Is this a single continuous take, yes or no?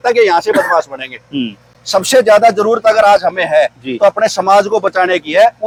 yes